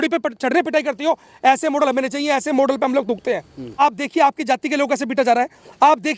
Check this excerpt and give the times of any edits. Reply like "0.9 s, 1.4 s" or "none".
3.6 s